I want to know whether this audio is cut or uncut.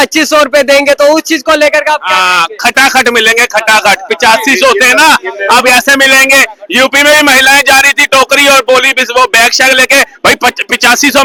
uncut